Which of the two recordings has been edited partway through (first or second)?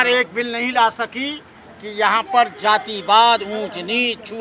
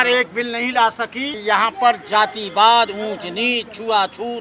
second